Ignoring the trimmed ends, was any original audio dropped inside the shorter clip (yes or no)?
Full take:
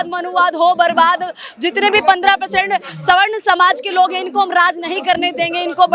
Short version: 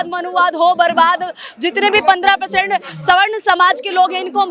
no